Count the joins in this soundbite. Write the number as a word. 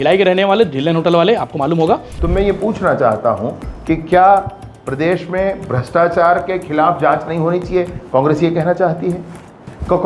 one